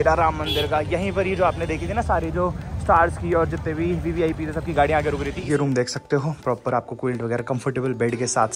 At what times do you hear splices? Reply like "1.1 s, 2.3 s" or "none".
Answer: 5.4 s